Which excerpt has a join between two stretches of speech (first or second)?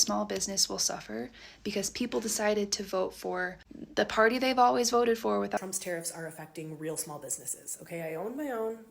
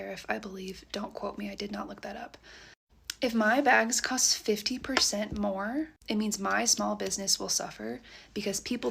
first